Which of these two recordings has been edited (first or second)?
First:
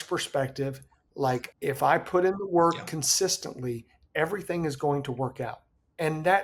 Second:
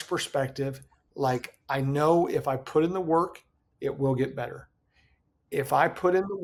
first